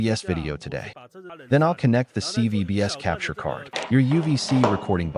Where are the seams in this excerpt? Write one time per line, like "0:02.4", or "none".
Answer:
0:01.3
0:03.7